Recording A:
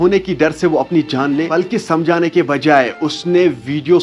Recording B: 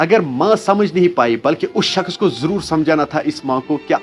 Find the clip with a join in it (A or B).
A